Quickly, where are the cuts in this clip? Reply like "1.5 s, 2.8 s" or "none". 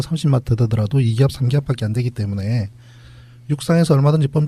3.1 s